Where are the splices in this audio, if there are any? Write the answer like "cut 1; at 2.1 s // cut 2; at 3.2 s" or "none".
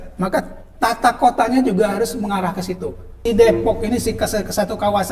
cut 1; at 3.3 s